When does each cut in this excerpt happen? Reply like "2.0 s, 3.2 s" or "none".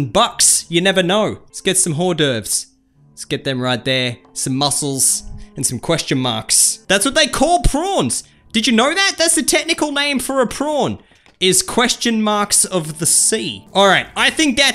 none